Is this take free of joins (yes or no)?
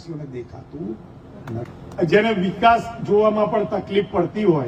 yes